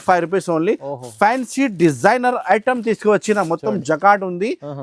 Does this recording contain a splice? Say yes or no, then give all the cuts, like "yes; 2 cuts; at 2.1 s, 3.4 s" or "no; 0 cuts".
no; 0 cuts